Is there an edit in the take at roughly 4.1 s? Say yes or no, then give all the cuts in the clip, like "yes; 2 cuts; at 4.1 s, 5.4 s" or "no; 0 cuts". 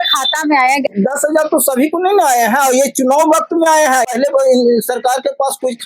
yes; 2 cuts; at 0.9 s, 4.1 s